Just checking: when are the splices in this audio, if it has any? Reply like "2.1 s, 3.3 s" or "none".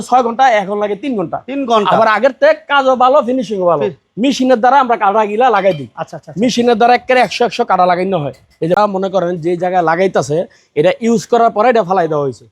8.8 s